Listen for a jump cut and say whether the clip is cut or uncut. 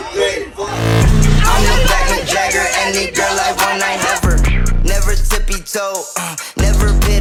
uncut